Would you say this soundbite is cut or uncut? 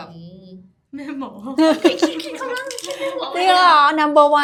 uncut